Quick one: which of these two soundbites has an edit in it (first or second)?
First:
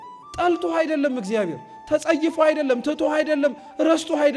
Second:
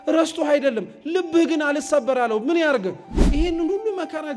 second